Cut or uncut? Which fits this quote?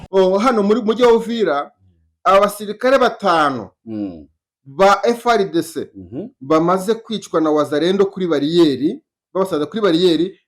uncut